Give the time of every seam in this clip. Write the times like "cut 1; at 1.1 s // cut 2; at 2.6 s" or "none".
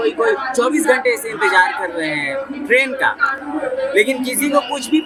none